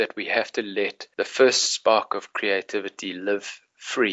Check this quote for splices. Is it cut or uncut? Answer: cut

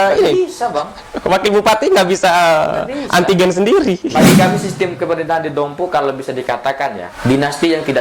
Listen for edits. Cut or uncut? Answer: cut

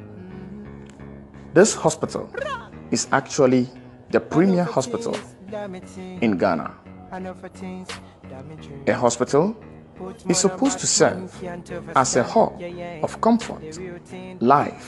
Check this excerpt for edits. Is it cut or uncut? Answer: uncut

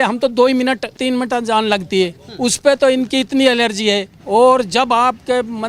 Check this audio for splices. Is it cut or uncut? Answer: cut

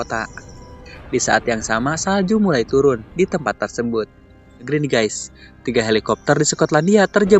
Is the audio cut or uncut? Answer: cut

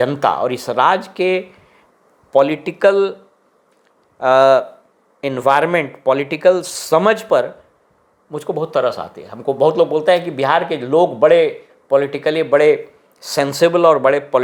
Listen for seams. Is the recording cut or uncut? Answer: uncut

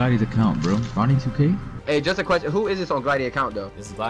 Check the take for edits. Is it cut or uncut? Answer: cut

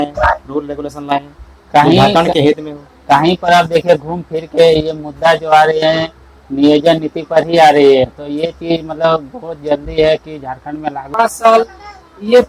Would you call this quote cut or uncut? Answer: cut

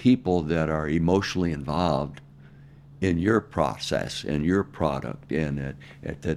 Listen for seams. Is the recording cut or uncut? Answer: uncut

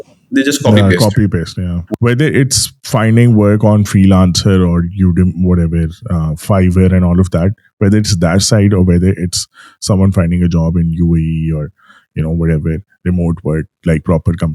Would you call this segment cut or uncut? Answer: cut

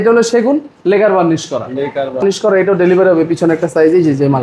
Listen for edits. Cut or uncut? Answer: cut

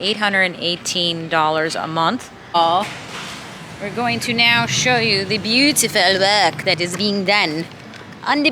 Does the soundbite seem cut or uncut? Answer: cut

